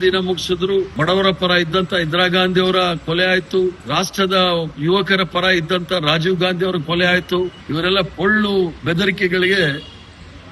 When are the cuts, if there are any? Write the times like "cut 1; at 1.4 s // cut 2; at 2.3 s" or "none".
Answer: cut 1; at 0.9 s // cut 2; at 3.8 s // cut 3; at 7.6 s